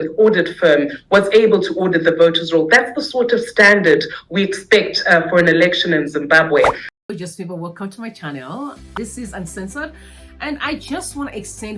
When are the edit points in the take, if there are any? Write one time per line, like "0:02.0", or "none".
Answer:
0:06.8